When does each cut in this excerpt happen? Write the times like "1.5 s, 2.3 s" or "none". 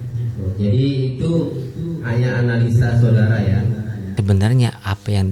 4.1 s